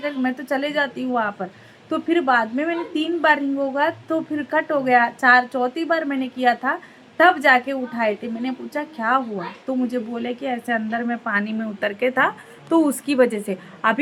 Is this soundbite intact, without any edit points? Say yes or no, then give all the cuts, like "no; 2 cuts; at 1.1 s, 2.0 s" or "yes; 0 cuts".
yes; 0 cuts